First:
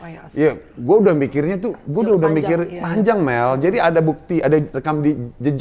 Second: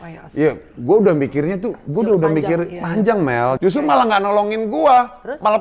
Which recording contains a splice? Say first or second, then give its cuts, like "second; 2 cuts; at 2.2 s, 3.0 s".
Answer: second; 1 cut; at 3.6 s